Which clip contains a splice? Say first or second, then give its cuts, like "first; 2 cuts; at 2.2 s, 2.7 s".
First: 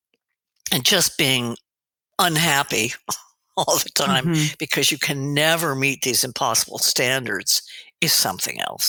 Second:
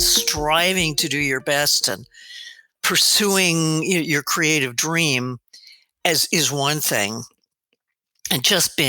second; 1 cut; at 2.8 s